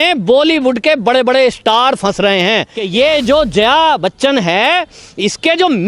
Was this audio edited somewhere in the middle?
yes; 1 cut; at 2.8 s

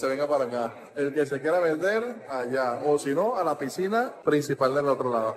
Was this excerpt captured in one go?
no; 1 cut; at 4.1 s

